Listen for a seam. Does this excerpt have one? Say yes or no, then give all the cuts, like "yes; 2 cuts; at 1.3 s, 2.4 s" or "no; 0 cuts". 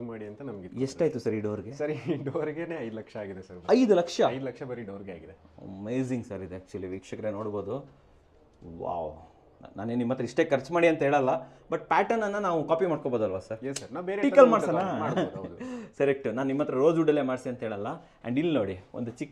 no; 0 cuts